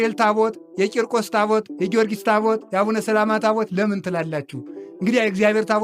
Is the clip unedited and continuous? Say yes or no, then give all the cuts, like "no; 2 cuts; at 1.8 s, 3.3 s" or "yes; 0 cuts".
yes; 0 cuts